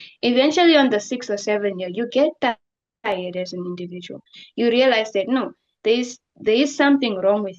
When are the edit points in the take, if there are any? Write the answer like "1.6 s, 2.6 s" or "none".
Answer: none